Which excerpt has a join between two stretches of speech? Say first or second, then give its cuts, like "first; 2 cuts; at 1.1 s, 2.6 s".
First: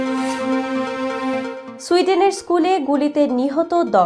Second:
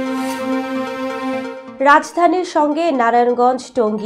second; 1 cut; at 1.6 s